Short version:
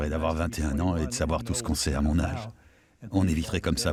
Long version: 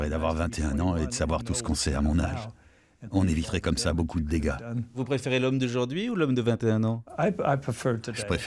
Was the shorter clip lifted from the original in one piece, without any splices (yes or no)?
yes